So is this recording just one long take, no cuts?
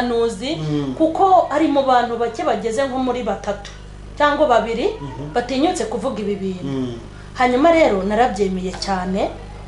yes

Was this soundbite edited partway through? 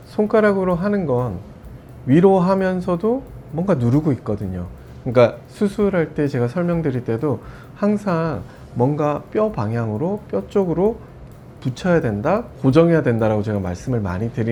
no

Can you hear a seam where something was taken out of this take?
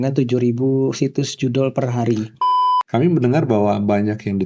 yes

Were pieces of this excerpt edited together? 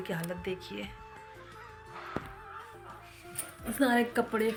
no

